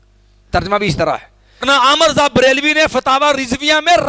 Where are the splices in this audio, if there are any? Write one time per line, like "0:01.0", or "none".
0:01.6